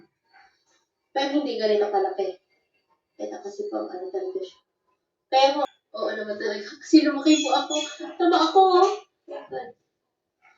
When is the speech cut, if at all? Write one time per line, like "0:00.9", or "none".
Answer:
0:05.6